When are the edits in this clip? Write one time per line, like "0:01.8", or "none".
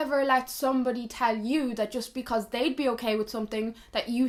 none